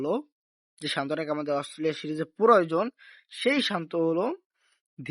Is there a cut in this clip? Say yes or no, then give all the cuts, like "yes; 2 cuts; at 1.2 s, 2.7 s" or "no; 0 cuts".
no; 0 cuts